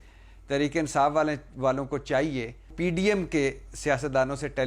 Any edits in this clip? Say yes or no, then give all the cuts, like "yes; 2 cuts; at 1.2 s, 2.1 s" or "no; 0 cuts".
yes; 1 cut; at 2.7 s